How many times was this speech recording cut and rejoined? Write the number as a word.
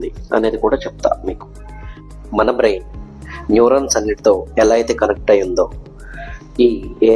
one